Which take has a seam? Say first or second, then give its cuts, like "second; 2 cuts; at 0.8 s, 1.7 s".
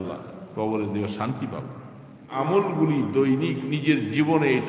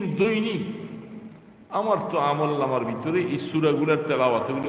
first; 1 cut; at 2.3 s